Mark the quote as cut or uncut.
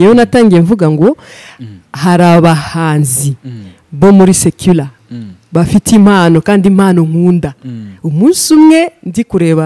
uncut